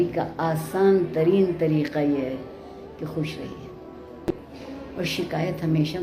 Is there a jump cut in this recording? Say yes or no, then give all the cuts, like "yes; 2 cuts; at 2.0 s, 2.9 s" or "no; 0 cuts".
no; 0 cuts